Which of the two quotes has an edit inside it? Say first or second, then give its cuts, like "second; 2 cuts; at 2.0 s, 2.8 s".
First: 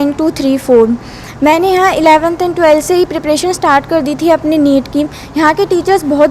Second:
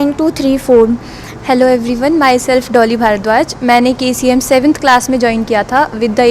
second; 1 cut; at 1.2 s